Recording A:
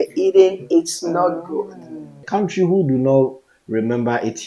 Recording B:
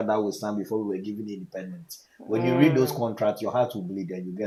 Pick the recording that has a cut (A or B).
A